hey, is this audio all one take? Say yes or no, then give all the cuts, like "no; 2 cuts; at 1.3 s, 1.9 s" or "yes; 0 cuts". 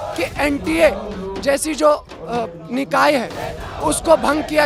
yes; 0 cuts